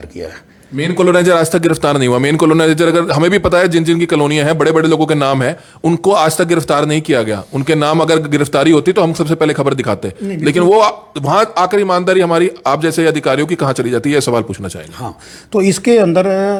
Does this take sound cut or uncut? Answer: uncut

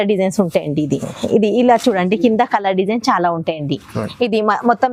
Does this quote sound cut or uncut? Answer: uncut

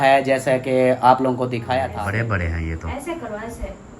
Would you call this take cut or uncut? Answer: cut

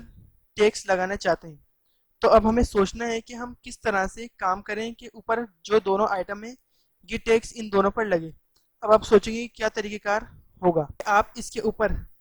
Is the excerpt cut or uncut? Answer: cut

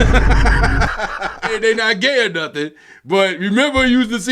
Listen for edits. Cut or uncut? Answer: cut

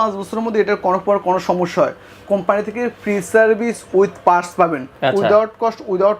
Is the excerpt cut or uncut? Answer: uncut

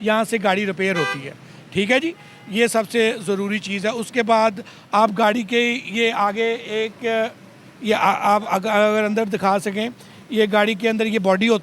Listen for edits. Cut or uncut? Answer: uncut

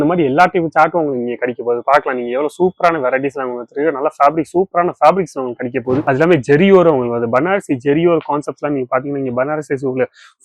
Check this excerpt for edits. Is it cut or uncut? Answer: cut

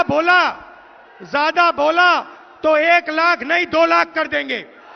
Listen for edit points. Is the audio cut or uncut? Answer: uncut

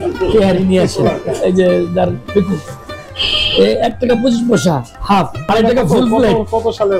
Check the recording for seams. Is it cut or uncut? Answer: cut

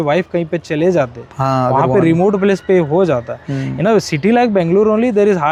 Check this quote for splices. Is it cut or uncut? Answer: uncut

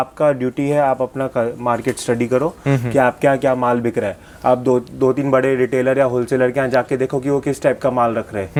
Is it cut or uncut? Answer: uncut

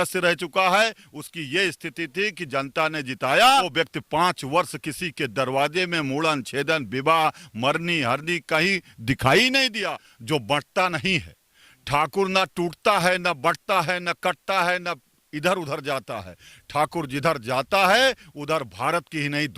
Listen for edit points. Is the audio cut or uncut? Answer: cut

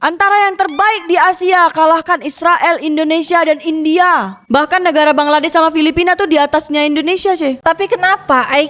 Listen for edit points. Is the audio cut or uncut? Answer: cut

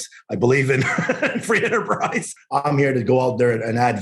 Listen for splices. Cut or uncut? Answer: cut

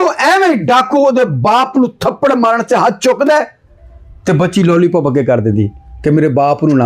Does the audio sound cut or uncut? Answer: uncut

